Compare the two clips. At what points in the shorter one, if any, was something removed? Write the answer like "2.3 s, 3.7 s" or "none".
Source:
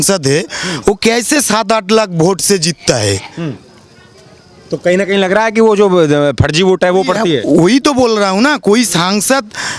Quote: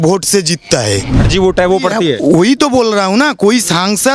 1.2 s